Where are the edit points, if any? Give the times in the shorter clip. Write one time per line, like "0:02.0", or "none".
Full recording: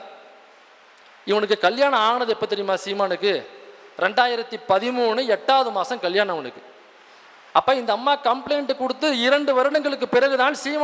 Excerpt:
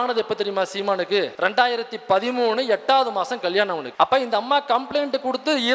0:01.3
0:03.9